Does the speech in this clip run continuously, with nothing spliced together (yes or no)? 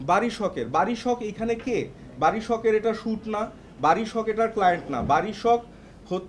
yes